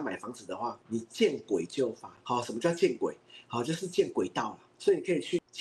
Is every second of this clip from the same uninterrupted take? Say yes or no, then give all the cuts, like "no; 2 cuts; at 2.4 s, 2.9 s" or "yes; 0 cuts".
yes; 0 cuts